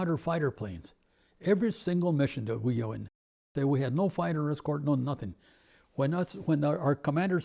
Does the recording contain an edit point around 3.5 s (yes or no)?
yes